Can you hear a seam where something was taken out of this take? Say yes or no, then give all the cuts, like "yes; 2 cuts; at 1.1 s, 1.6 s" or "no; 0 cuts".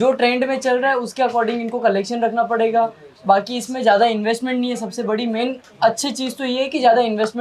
no; 0 cuts